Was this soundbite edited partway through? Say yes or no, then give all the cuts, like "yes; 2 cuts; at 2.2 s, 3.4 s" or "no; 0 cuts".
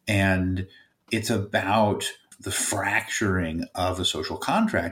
yes; 1 cut; at 2.3 s